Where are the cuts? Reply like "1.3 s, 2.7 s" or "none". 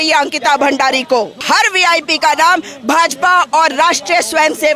1.4 s